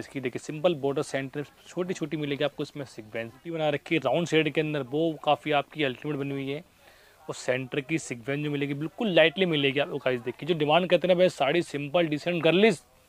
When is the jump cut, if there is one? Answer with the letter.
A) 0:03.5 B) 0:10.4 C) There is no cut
A